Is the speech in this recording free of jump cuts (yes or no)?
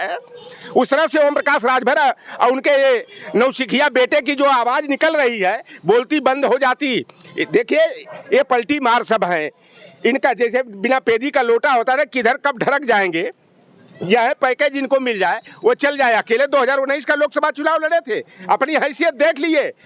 yes